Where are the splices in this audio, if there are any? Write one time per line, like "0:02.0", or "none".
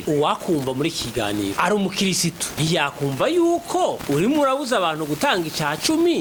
none